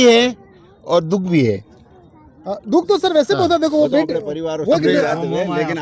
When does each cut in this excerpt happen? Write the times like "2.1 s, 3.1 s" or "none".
none